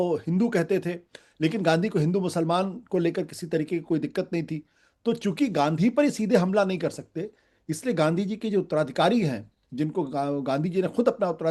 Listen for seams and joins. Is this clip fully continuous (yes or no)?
yes